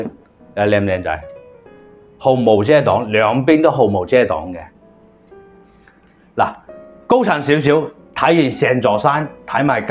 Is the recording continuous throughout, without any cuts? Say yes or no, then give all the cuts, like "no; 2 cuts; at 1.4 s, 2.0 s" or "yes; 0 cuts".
yes; 0 cuts